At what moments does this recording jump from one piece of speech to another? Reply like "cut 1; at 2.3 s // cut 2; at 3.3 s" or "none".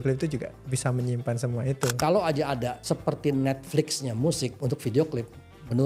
cut 1; at 1.9 s // cut 2; at 2.8 s // cut 3; at 4.6 s